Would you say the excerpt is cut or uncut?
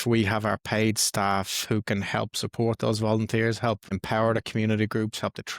cut